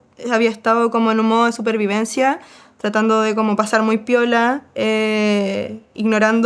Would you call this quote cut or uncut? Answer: uncut